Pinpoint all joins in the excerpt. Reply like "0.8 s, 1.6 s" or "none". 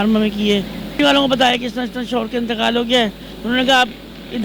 1.0 s